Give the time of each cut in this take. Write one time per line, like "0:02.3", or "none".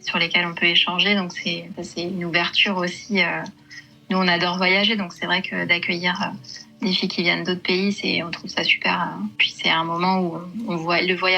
0:01.8
0:09.5